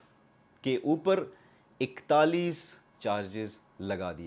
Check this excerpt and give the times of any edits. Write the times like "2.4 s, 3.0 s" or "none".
2.9 s